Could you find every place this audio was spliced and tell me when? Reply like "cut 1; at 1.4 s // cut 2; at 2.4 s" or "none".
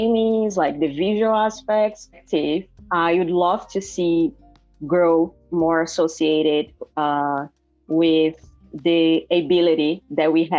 cut 1; at 2.2 s